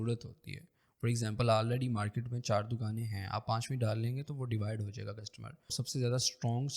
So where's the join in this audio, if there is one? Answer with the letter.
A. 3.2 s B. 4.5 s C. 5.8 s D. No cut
C